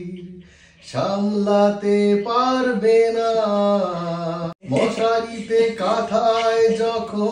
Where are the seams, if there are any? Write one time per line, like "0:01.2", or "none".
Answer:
0:04.5